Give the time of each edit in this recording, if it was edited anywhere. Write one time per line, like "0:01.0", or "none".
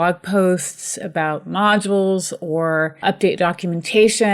0:03.0